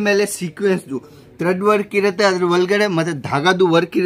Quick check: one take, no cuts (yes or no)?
yes